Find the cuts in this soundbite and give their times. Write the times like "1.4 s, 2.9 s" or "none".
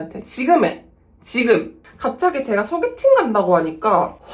1.8 s